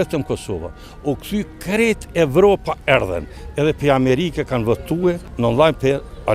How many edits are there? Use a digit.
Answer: 1